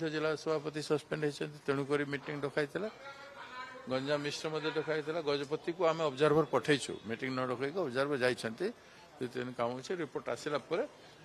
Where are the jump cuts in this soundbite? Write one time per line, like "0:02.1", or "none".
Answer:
none